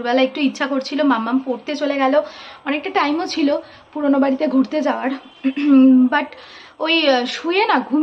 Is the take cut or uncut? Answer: uncut